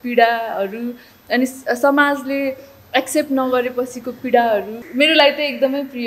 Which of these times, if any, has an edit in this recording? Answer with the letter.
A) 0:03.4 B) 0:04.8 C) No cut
B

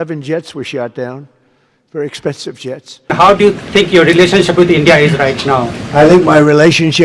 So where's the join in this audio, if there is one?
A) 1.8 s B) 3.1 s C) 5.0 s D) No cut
B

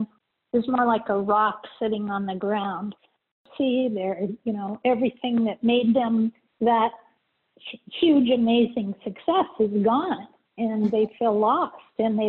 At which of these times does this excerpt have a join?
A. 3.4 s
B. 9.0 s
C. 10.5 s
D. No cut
A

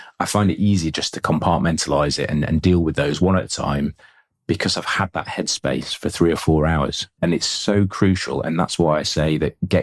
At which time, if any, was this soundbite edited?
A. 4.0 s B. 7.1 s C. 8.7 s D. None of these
B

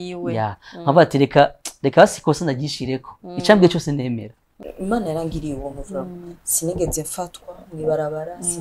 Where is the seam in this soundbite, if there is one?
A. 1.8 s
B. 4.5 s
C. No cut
B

